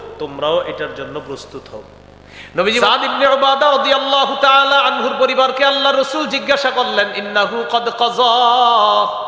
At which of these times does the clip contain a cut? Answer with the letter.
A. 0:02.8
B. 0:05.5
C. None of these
A